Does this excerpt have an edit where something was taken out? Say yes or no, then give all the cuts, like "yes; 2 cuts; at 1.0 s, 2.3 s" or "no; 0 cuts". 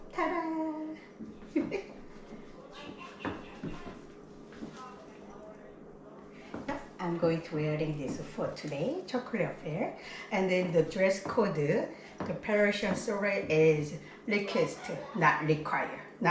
no; 0 cuts